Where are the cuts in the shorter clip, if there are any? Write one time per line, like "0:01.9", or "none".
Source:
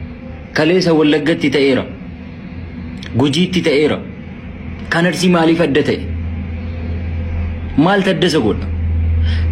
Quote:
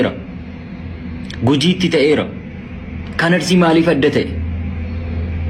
none